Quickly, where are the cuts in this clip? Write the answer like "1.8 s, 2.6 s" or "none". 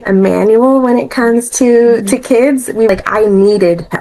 2.9 s